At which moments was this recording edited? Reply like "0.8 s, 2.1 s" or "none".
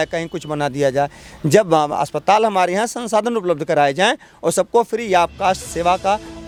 none